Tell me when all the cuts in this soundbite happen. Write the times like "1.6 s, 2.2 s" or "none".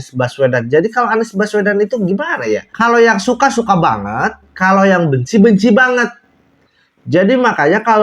none

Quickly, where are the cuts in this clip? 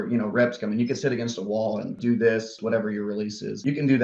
1.9 s, 2.6 s

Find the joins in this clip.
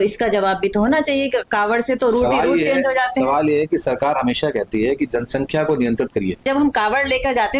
6.4 s

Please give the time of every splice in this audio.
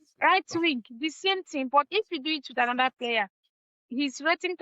none

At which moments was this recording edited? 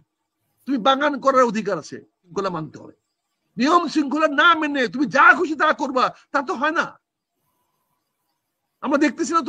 2.2 s

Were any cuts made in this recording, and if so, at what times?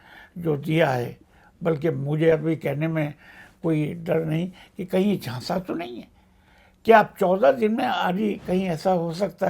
none

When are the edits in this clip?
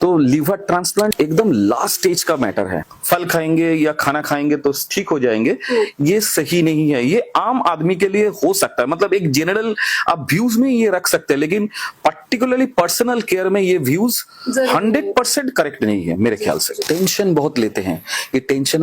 1.1 s, 2.9 s, 16.7 s

